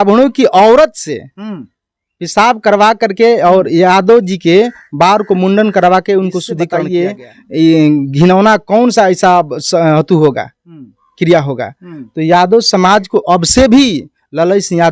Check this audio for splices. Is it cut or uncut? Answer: cut